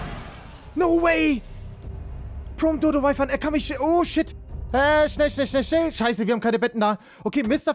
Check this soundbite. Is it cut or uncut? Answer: uncut